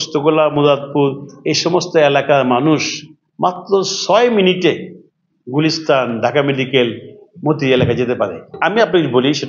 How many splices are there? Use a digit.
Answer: 0